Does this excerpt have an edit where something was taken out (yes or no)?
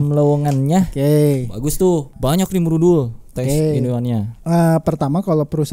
yes